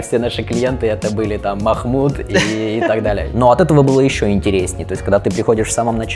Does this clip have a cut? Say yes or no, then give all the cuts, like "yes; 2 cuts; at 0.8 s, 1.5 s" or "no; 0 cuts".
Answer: no; 0 cuts